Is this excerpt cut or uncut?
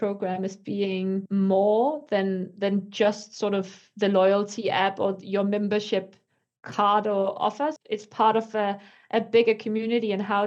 cut